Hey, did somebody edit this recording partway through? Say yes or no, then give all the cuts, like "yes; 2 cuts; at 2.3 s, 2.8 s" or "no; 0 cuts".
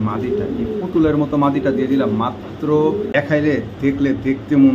yes; 1 cut; at 3.1 s